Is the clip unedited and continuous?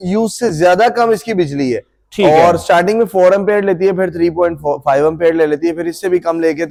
yes; 0 cuts

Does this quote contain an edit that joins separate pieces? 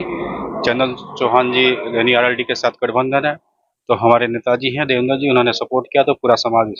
no; 0 cuts

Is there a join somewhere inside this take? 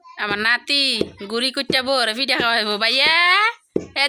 no; 0 cuts

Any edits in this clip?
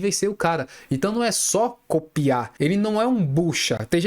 yes; 1 cut; at 2.5 s

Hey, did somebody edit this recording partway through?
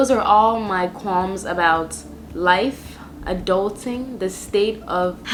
no; 0 cuts

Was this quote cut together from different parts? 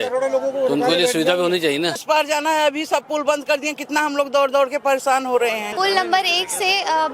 yes; 2 cuts; at 2.0 s, 5.7 s

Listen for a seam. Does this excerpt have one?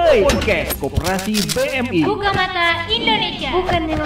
no; 0 cuts

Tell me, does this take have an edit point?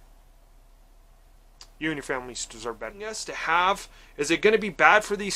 yes; 1 cut; at 3.3 s

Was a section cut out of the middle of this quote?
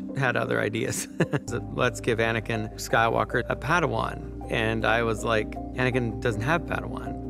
yes; 1 cut; at 1.5 s

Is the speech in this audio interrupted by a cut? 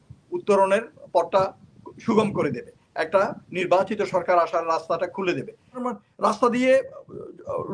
yes; 1 cut; at 5.9 s

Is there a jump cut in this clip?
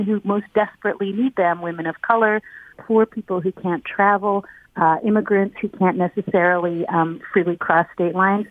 yes; 1 cut; at 2.8 s

